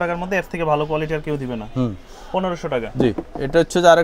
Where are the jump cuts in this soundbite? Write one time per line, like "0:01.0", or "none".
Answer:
none

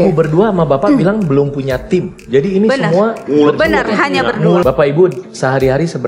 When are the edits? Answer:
0:04.6

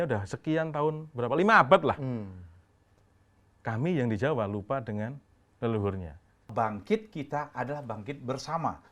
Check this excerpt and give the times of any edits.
0:06.5

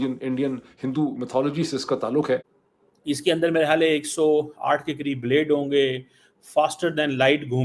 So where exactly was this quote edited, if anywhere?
0:02.6

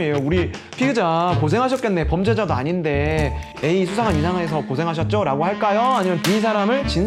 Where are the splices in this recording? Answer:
none

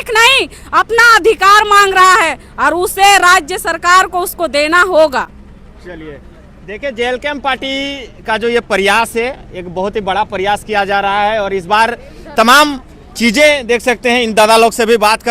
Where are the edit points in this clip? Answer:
none

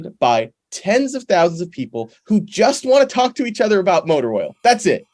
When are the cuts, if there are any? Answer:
none

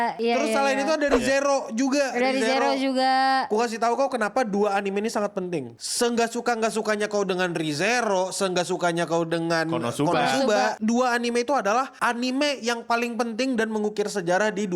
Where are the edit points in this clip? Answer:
none

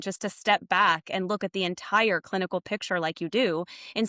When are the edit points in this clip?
none

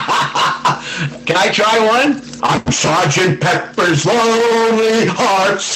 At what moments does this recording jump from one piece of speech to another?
0:02.3

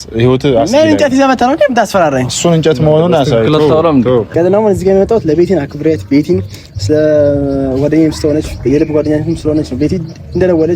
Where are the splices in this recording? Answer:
0:04.3

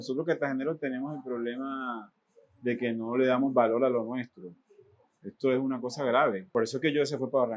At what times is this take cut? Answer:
0:06.4

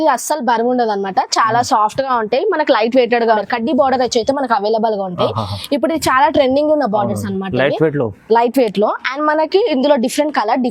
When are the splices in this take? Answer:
0:03.4

